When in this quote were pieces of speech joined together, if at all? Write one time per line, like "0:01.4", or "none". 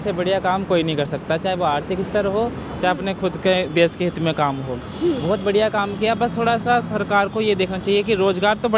none

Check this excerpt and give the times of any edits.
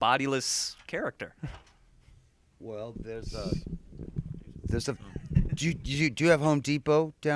0:05.5

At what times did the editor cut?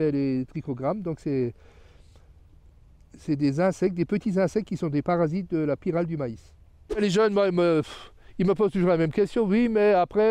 0:07.0

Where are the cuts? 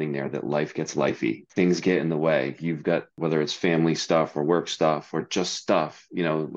0:01.4
0:03.1

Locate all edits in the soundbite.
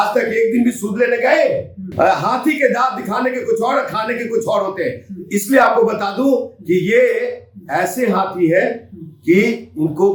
none

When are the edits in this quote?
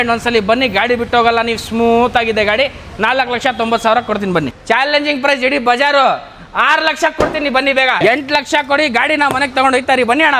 0:04.5
0:08.0

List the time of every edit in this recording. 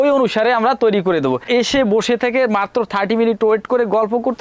0:01.4

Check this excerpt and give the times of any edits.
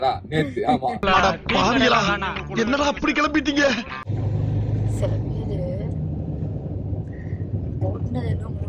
0:04.1

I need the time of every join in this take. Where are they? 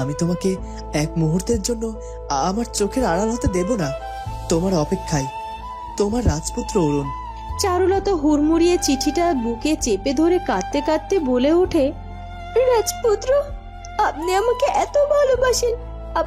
none

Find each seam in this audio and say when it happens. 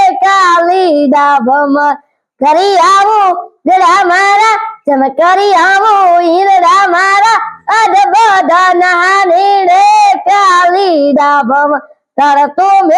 none

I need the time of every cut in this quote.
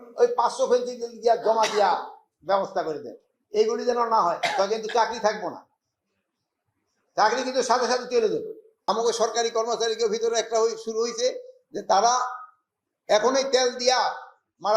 0:08.8

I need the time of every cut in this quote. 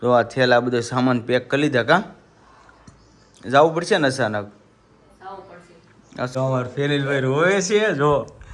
0:06.3

